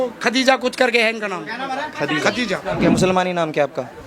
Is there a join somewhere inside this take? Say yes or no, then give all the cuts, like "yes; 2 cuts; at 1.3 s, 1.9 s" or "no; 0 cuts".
yes; 1 cut; at 2.8 s